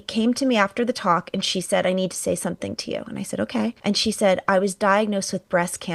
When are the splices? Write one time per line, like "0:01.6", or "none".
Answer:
0:03.8